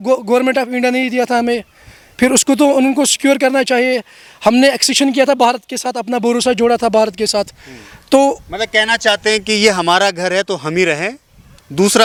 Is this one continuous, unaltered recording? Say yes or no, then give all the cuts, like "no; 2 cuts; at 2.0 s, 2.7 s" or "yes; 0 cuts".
yes; 0 cuts